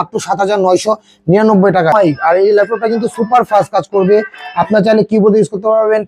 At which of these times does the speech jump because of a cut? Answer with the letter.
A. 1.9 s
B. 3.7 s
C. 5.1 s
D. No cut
A